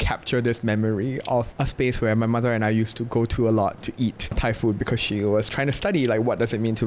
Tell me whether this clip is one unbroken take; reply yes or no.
yes